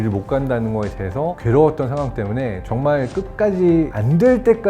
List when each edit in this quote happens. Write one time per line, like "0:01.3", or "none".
none